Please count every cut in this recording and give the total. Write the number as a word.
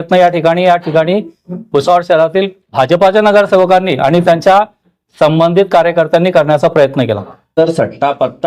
one